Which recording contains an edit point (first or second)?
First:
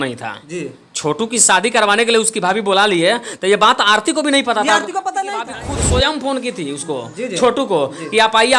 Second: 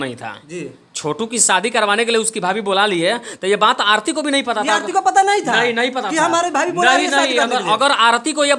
first